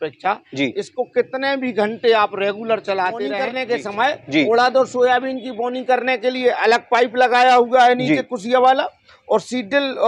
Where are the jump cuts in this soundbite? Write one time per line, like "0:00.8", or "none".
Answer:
0:03.6